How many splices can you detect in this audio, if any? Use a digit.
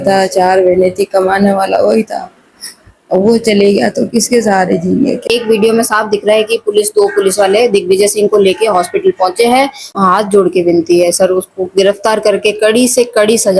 2